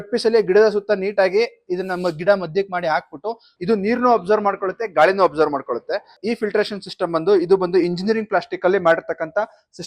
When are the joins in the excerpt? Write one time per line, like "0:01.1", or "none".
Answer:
0:03.5
0:06.2

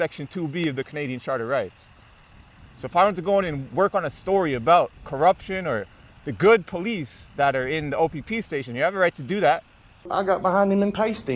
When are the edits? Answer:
0:10.1

